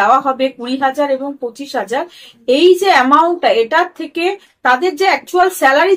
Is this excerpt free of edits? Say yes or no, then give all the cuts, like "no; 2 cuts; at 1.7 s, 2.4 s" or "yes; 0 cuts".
yes; 0 cuts